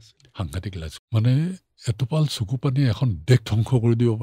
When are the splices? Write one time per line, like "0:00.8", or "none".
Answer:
0:01.0